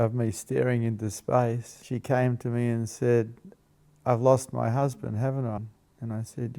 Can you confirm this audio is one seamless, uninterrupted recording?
no; 2 cuts; at 1.7 s, 5.7 s

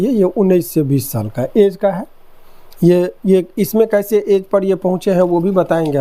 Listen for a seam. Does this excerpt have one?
no; 0 cuts

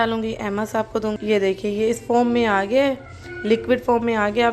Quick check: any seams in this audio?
no; 0 cuts

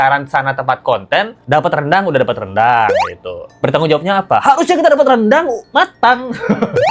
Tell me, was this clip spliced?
no; 0 cuts

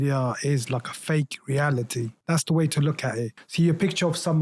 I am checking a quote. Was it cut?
yes; 2 cuts; at 2.1 s, 3.4 s

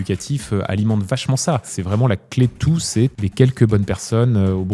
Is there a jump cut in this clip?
yes; 2 cuts; at 1.8 s, 3.1 s

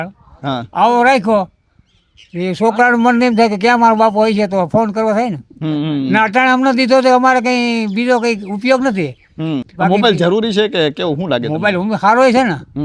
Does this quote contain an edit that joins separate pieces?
no; 0 cuts

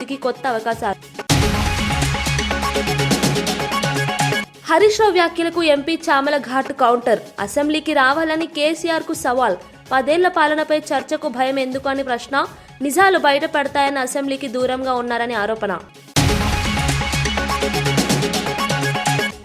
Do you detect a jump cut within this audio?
yes; 2 cuts; at 1.1 s, 15.9 s

